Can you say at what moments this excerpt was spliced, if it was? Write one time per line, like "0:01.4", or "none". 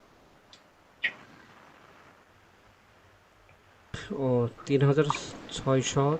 0:04.1